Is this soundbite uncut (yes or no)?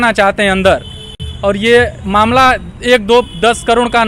yes